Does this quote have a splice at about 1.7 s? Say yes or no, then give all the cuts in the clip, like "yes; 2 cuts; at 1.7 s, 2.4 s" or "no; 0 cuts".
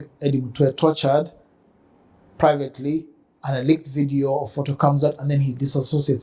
no; 0 cuts